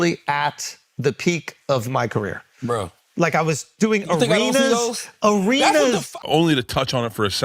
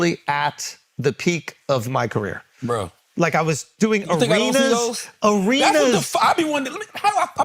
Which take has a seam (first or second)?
first